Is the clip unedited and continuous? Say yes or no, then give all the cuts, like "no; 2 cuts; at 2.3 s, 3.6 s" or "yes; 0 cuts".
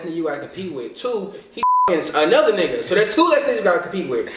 yes; 0 cuts